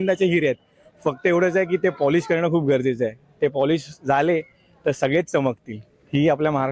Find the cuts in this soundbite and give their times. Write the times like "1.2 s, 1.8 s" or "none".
none